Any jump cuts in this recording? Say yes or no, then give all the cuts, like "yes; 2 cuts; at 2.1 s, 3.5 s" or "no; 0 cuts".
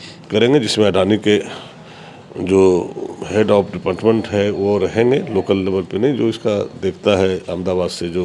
no; 0 cuts